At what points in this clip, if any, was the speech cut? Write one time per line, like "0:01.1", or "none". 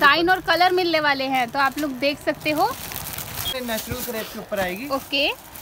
0:03.5